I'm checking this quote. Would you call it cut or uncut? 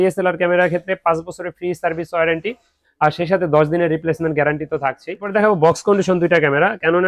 cut